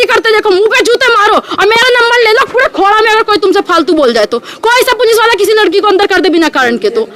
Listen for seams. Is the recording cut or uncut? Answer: uncut